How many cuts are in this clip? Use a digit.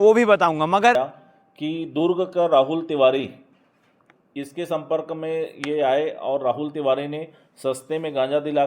1